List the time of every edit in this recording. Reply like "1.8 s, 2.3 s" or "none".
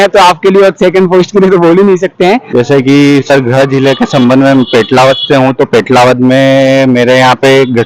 2.4 s